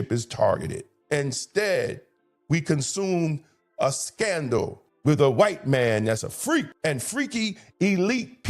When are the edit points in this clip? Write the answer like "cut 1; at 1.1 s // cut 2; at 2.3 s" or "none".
none